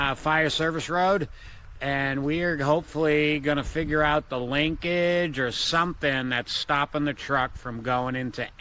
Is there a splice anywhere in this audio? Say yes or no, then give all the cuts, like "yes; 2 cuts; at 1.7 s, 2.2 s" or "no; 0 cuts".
no; 0 cuts